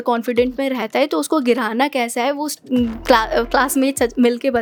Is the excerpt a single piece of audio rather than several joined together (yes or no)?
yes